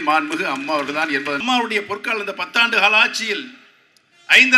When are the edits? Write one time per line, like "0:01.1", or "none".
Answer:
0:01.4

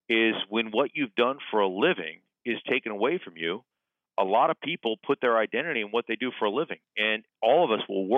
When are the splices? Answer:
none

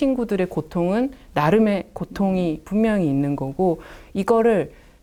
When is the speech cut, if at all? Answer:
none

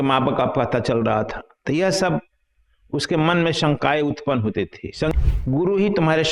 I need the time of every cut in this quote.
0:05.1

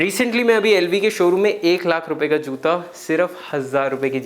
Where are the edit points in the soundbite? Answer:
none

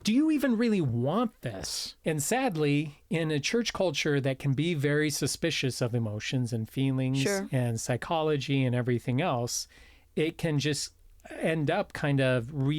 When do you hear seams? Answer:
0:01.9

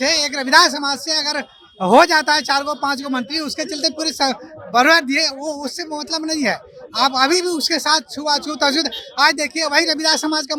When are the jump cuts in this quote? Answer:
none

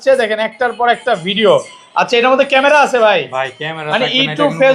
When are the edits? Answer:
none

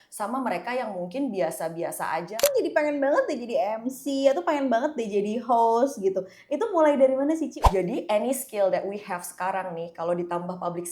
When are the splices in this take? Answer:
0:02.4
0:07.6

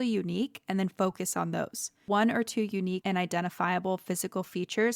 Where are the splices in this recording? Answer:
0:02.0
0:03.0

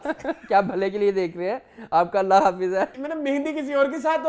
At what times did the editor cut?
0:03.0

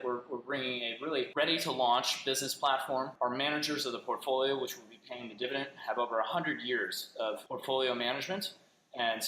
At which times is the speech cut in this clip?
0:01.3
0:03.1
0:07.4

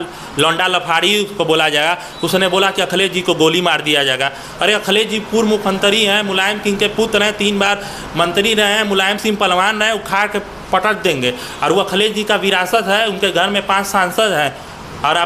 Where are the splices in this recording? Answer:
none

